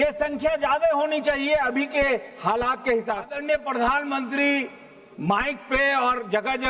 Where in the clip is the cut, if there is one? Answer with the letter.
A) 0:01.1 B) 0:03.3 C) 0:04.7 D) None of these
B